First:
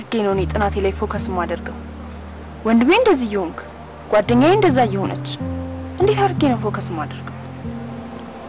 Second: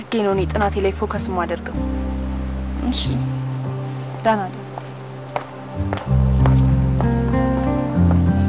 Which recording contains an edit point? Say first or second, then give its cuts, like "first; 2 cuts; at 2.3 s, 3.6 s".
first; 1 cut; at 1.7 s